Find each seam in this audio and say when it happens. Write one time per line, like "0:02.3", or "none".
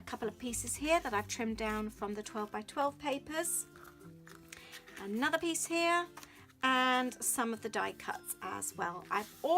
0:01.9